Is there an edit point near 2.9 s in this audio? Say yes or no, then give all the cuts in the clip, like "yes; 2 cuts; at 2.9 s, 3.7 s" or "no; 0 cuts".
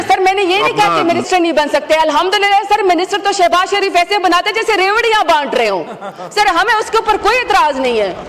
no; 1 cut; at 1.3 s